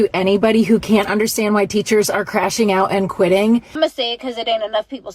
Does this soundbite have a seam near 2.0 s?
no; 1 cut; at 3.7 s

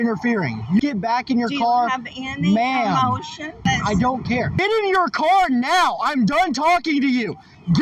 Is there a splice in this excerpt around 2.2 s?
no; 3 cuts; at 0.8 s, 3.6 s, 4.6 s

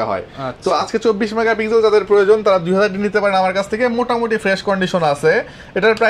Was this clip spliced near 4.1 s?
no; 0 cuts

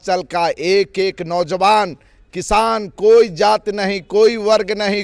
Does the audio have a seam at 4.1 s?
no; 0 cuts

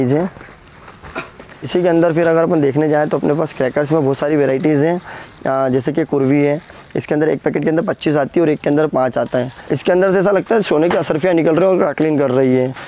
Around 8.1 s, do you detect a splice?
no; 2 cuts; at 1.6 s, 9.6 s

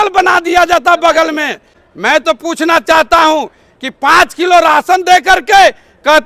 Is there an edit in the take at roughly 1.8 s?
yes; 1 cut; at 1.8 s

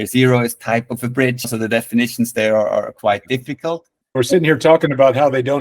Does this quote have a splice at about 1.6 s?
no; 1 cut; at 4.0 s

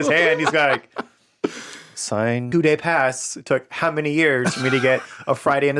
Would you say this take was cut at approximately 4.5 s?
no; 1 cut; at 2.5 s

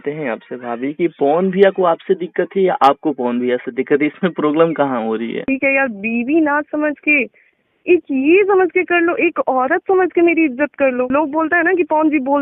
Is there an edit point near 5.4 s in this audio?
yes; 2 cuts; at 5.4 s, 11.1 s

